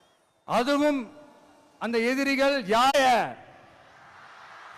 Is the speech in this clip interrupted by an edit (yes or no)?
yes